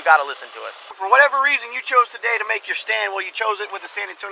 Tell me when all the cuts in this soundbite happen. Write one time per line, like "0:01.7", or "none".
0:01.0